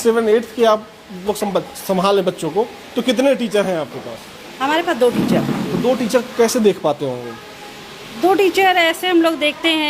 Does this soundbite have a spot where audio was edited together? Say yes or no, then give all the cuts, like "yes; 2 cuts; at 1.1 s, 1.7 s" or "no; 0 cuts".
no; 0 cuts